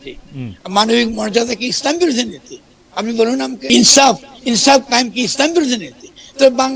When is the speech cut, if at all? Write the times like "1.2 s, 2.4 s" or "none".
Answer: 3.7 s